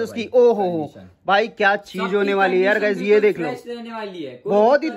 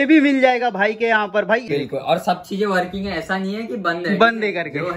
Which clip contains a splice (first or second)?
second